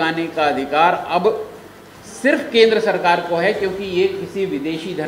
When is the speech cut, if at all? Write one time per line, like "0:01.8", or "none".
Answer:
none